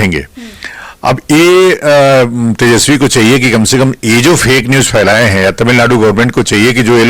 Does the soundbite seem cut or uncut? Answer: uncut